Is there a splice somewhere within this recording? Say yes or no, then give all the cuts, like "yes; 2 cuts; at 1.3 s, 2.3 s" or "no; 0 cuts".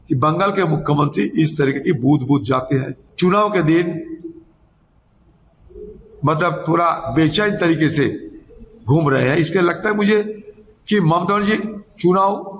yes; 1 cut; at 3.0 s